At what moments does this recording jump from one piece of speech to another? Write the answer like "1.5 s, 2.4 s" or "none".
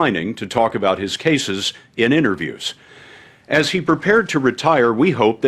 1.0 s